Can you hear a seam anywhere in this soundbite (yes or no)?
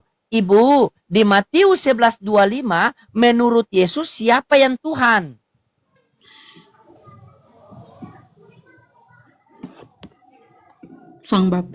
no